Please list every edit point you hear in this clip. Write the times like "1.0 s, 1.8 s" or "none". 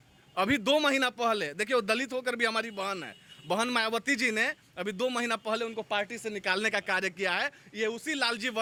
none